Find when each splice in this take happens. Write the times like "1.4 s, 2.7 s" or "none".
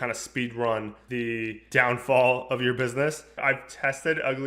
1.2 s, 3.4 s